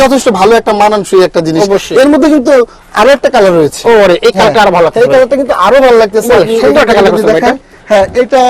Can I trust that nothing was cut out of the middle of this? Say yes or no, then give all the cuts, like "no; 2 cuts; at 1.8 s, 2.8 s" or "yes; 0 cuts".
yes; 0 cuts